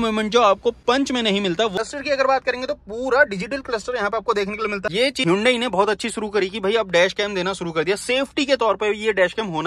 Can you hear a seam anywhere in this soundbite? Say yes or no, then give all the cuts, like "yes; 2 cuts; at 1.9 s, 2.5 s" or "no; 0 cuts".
yes; 2 cuts; at 1.8 s, 4.8 s